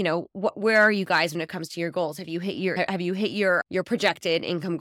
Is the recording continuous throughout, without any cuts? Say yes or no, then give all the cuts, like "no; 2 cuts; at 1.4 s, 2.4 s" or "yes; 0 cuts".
yes; 0 cuts